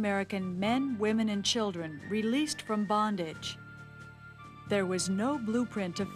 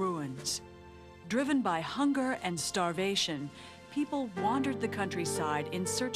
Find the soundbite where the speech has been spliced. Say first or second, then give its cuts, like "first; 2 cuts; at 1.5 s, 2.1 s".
second; 1 cut; at 4.8 s